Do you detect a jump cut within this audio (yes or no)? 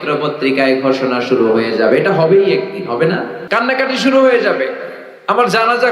yes